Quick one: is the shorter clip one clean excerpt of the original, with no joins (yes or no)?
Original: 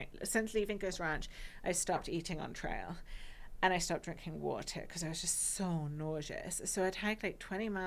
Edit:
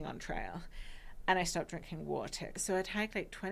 no